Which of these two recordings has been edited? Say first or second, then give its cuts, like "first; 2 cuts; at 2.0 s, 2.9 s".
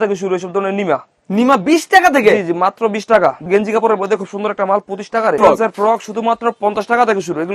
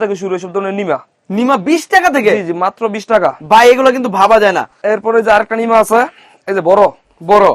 first; 2 cuts; at 3.5 s, 5.4 s